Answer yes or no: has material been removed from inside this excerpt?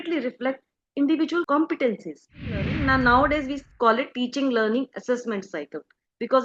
yes